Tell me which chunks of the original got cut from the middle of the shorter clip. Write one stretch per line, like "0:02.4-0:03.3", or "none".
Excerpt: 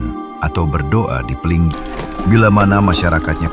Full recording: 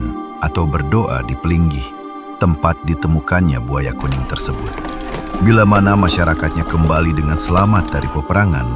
0:01.8-0:04.9